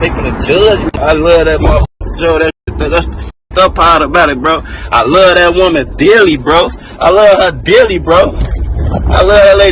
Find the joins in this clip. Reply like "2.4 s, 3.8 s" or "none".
1.0 s